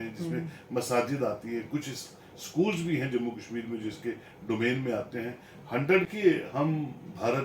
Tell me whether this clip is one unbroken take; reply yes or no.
no